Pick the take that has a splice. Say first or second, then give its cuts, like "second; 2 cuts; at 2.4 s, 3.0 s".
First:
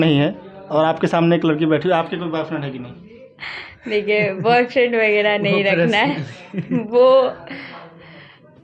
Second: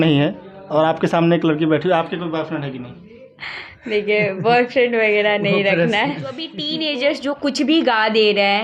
second; 1 cut; at 6.5 s